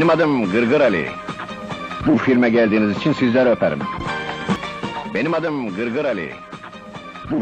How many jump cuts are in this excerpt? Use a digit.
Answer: 2